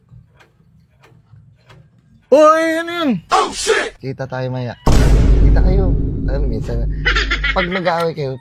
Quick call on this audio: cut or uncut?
uncut